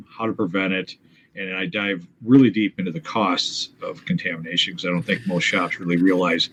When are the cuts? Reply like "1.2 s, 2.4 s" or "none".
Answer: none